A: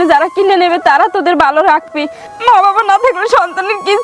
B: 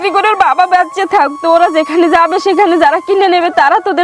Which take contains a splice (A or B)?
A